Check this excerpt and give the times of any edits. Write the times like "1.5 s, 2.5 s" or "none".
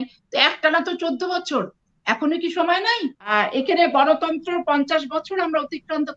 3.2 s